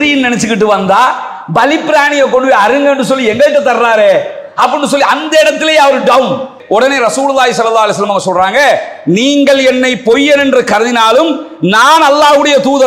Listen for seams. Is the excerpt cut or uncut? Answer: cut